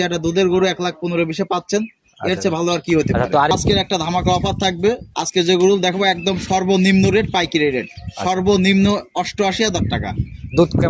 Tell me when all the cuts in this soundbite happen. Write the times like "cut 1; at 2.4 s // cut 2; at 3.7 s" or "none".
cut 1; at 3.5 s